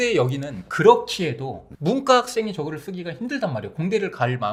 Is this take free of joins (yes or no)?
yes